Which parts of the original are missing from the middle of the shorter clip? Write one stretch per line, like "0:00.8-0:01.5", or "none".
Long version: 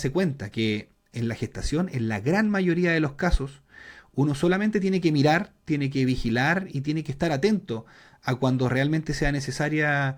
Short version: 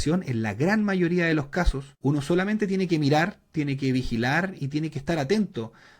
0:03.5-0:04.0